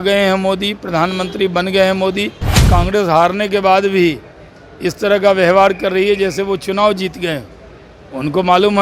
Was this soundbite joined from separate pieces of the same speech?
yes; 1 cut; at 2.6 s

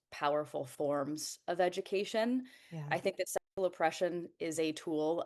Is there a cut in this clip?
no; 0 cuts

